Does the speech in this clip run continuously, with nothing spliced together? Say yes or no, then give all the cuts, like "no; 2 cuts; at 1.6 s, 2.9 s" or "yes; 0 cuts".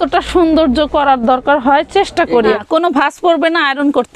no; 1 cut; at 2.6 s